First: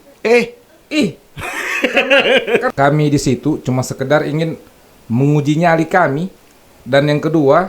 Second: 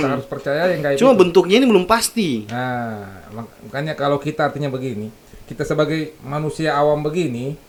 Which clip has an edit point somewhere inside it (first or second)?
first